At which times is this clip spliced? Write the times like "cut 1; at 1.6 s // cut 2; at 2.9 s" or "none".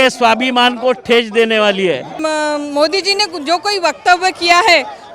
cut 1; at 2.1 s